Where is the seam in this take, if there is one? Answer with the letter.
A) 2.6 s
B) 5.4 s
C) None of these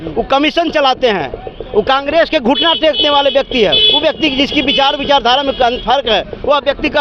C